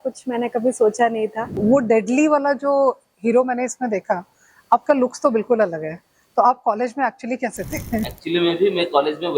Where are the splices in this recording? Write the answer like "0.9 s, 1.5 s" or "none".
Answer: 1.6 s, 8.2 s